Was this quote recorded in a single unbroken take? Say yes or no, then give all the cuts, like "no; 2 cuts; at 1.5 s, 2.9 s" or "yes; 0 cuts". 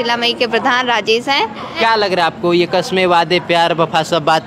yes; 0 cuts